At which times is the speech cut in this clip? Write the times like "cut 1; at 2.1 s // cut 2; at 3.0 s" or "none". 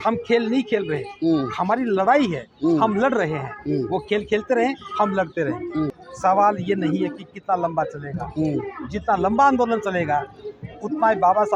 cut 1; at 6.0 s